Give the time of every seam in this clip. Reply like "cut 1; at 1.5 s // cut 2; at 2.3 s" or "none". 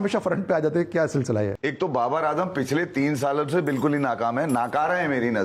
cut 1; at 1.6 s